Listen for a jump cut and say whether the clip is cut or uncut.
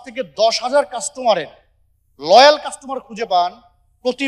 uncut